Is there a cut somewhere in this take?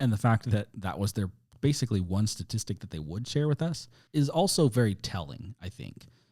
yes; 1 cut; at 4.0 s

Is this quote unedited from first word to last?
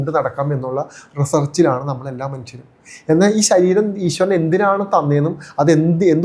yes; 0 cuts

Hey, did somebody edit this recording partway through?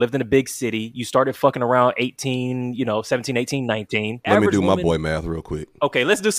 yes; 1 cut; at 3.7 s

